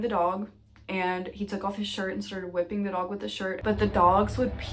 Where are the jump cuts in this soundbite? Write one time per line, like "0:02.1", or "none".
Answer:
0:03.5